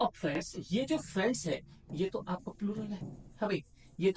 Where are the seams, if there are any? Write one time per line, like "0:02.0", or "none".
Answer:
none